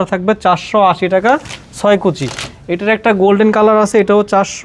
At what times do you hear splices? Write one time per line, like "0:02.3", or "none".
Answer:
none